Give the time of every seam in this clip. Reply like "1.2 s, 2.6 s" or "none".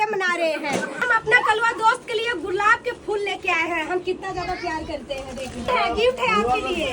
1.1 s, 5.7 s